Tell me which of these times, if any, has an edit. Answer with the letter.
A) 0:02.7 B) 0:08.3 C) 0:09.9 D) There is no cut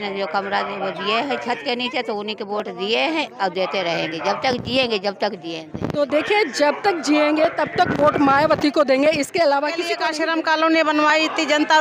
C